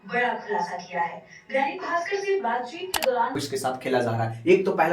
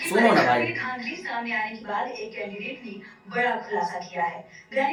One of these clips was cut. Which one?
first; 1 cut; at 3.4 s

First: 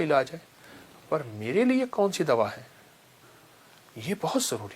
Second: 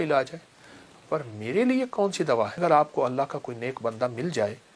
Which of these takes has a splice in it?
second; 1 cut; at 2.6 s

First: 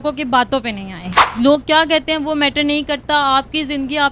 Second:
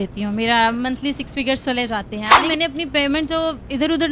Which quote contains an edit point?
second; 1 cut; at 2.4 s

